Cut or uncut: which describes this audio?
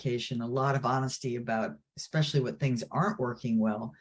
uncut